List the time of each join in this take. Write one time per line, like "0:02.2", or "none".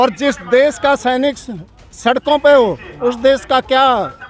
none